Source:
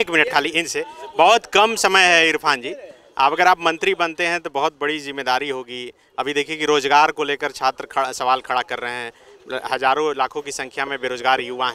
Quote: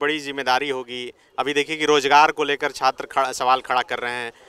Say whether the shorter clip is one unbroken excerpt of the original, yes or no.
yes